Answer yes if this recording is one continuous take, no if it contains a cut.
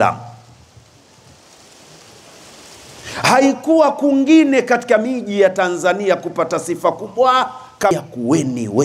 no